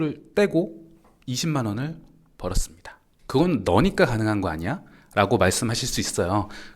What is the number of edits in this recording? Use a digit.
0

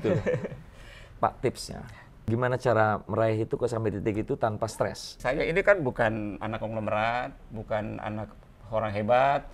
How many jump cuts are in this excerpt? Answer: 2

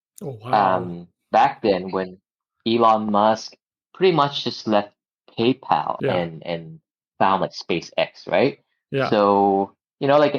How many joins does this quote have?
1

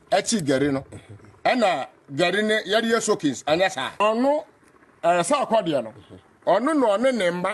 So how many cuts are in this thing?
1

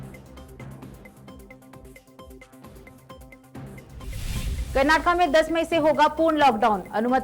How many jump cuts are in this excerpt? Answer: 0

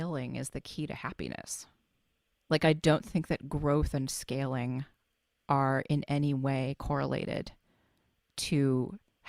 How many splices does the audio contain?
0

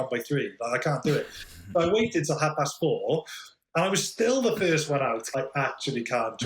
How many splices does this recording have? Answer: 1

